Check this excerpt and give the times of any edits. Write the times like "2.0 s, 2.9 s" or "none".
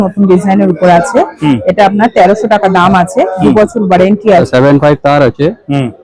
4.5 s